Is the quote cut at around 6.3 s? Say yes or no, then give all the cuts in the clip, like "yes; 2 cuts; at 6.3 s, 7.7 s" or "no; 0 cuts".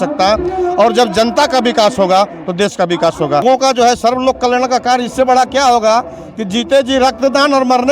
no; 1 cut; at 3.4 s